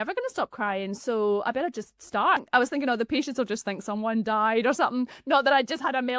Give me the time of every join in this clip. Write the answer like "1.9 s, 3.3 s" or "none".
2.4 s